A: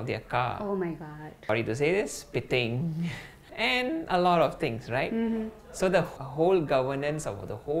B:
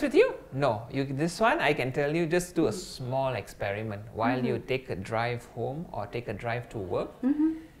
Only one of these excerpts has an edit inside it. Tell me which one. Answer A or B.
A